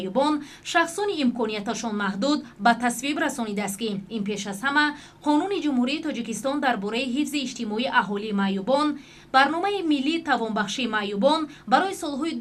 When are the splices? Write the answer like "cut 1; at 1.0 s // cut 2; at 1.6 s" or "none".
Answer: none